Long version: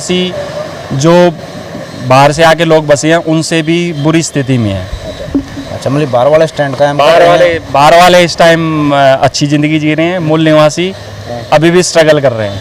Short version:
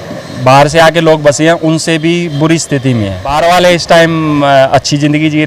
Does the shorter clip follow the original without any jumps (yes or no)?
no